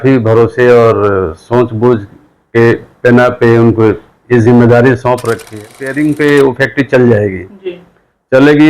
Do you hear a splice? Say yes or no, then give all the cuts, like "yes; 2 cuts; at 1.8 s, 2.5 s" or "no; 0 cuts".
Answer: yes; 1 cut; at 5.7 s